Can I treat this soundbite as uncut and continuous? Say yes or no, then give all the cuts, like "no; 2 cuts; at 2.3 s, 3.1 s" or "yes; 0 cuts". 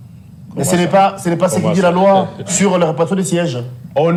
yes; 0 cuts